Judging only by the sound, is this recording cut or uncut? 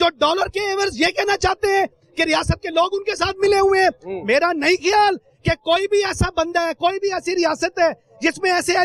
uncut